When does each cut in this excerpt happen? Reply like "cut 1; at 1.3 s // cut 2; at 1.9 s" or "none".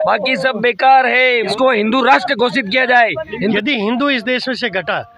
cut 1; at 1.5 s // cut 2; at 3.6 s